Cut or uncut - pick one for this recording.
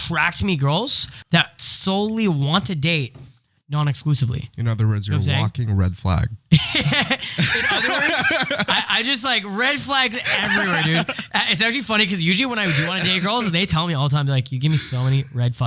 cut